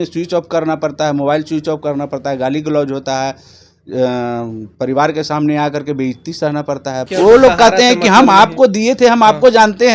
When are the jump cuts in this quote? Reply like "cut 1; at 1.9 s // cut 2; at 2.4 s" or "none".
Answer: cut 1; at 7.1 s